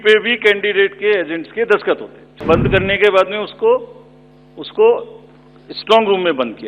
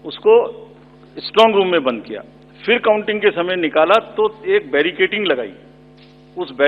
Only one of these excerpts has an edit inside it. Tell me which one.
first; 1 cut; at 2.4 s

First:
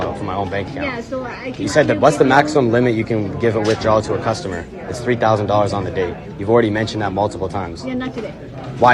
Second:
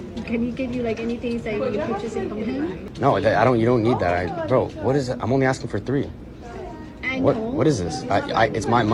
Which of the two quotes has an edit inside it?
second; 1 cut; at 2.8 s

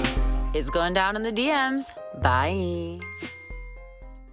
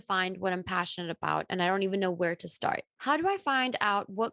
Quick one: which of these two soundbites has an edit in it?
second; 1 cut; at 2.9 s

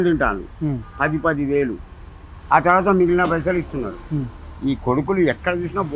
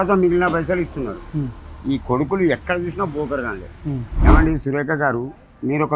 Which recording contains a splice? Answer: second; 1 cut; at 4.1 s

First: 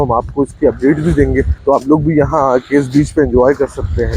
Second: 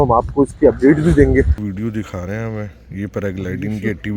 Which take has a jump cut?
second; 1 cut; at 1.5 s

